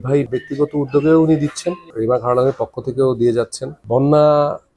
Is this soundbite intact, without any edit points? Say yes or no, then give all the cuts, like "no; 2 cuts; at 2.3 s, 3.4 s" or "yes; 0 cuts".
no; 1 cut; at 3.8 s